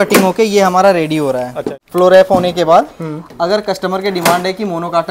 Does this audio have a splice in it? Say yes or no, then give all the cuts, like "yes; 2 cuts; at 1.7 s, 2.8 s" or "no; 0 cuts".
yes; 1 cut; at 1.7 s